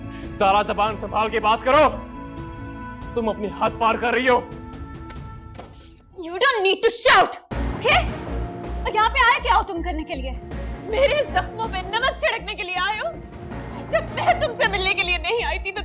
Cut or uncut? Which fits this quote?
uncut